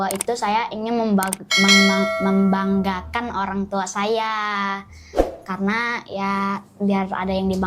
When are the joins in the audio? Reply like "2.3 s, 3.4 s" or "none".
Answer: none

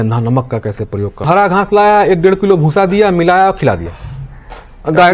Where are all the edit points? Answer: 1.2 s

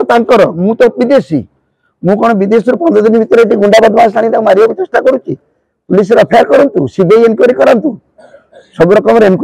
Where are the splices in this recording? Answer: none

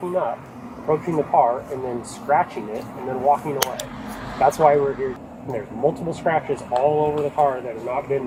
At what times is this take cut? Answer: none

